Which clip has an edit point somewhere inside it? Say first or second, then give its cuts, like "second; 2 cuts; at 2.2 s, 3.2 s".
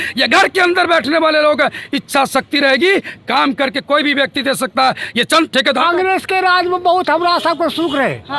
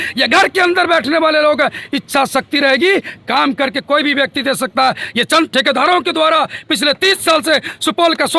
first; 1 cut; at 5.8 s